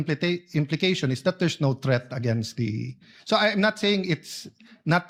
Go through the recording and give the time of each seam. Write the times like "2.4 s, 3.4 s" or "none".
none